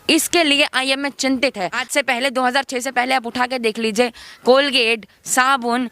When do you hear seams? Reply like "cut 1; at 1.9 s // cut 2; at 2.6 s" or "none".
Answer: cut 1; at 1.8 s